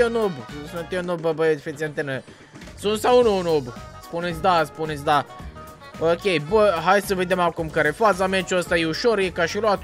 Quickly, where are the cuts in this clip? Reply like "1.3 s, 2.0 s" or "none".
none